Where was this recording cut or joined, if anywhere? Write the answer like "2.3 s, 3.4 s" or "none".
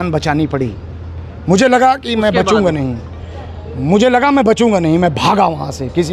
none